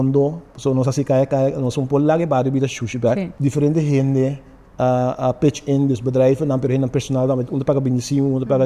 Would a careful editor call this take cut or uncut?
cut